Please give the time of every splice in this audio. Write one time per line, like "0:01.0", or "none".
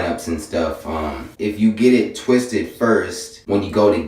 0:01.3